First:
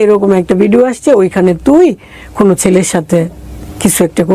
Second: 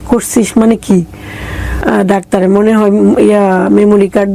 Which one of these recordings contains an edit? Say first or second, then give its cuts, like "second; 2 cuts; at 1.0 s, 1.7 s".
second; 1 cut; at 1.8 s